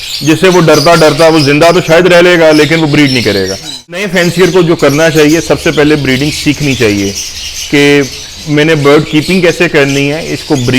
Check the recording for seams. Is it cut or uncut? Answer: cut